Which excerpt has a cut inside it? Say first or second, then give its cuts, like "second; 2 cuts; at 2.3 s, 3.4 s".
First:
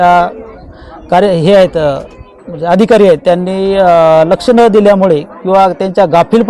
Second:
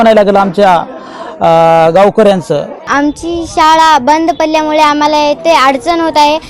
second; 1 cut; at 2.8 s